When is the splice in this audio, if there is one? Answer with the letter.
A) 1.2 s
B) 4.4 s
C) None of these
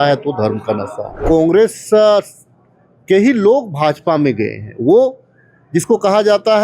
A